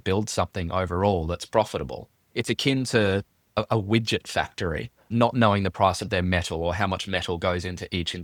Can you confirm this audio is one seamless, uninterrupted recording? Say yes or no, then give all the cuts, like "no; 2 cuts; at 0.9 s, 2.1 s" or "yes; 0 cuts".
yes; 0 cuts